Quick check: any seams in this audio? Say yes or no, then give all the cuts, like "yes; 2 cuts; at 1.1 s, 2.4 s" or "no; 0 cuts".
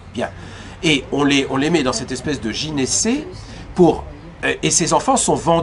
no; 0 cuts